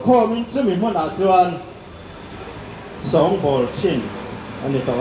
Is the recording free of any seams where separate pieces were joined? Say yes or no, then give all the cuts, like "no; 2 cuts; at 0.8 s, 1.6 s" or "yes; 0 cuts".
yes; 0 cuts